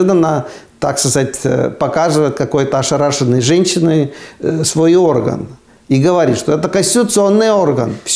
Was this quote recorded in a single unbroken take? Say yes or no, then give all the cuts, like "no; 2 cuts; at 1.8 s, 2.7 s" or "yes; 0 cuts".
yes; 0 cuts